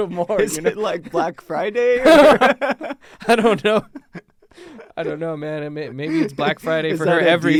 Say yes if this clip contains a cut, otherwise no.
no